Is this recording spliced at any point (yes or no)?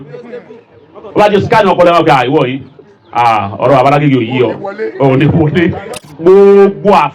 yes